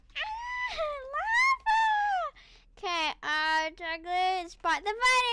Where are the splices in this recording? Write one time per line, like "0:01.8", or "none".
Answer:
none

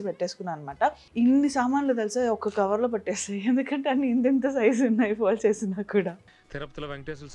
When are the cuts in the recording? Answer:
0:01.0

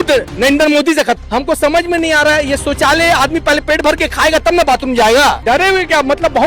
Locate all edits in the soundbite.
0:01.2
0:05.4

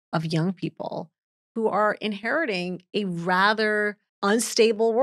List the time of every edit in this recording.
0:04.0

